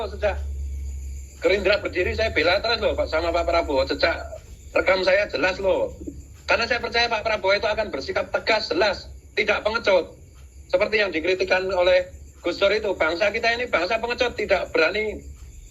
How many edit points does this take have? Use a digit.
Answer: 0